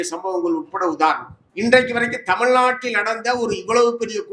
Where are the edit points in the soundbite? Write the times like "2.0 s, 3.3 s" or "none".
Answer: 1.3 s